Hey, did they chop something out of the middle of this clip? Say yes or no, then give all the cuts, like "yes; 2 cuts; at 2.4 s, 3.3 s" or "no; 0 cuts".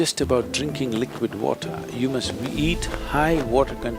no; 0 cuts